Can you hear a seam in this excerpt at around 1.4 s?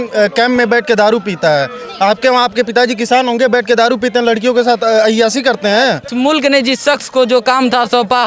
no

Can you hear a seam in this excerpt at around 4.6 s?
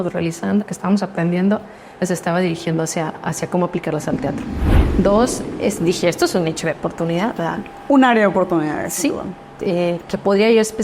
yes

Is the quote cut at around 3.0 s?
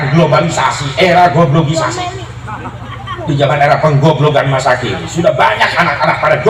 no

